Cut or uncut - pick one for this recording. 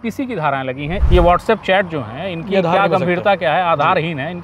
cut